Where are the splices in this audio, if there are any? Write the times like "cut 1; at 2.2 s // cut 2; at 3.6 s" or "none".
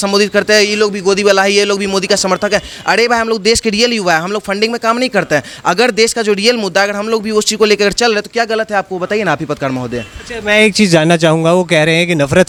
none